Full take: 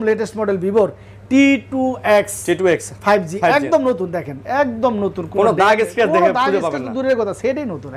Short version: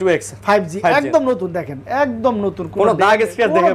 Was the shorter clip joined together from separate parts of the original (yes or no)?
no